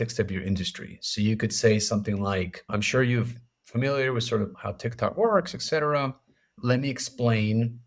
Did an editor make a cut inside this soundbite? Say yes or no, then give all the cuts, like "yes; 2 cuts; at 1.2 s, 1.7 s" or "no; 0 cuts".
yes; 3 cuts; at 2.7 s, 4.6 s, 6.6 s